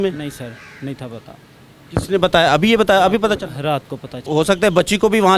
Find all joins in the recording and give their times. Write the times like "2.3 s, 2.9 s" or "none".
4.1 s